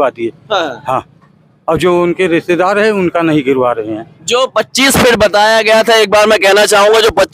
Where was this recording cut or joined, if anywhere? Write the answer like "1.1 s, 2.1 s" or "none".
none